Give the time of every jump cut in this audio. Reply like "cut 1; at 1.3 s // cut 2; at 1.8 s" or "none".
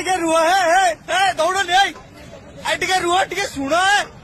none